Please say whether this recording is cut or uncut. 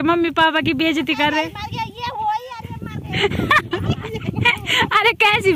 uncut